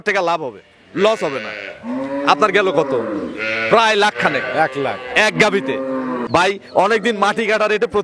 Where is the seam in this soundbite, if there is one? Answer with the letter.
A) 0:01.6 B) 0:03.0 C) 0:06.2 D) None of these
C